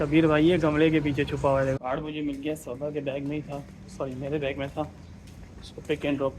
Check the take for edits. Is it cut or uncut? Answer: cut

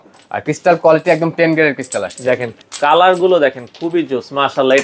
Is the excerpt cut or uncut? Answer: cut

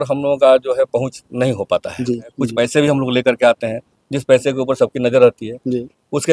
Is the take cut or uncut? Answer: cut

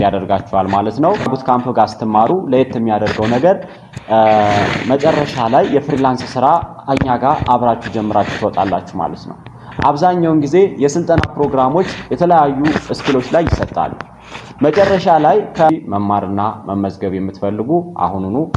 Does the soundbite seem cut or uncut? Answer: cut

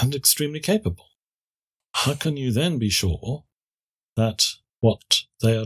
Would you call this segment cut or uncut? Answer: cut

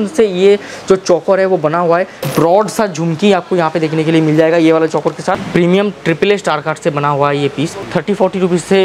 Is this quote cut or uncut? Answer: cut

